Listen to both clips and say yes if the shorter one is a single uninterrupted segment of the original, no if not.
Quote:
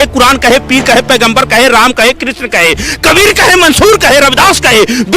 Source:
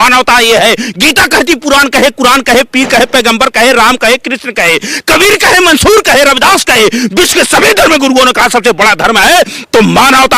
yes